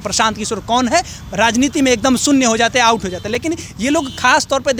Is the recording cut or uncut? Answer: uncut